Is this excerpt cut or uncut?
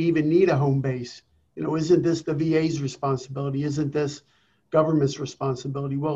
uncut